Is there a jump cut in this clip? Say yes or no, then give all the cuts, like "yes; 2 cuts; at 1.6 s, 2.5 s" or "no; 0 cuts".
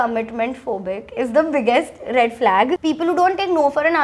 yes; 1 cut; at 2.8 s